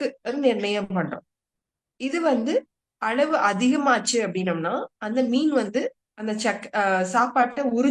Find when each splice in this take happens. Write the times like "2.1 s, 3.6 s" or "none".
none